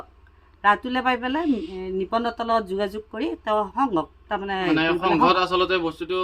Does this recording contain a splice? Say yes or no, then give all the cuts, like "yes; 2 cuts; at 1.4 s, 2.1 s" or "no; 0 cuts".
no; 0 cuts